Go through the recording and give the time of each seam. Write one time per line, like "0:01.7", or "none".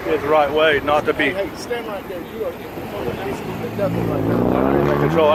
none